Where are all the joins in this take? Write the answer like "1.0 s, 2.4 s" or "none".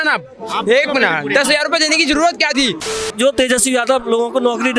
3.0 s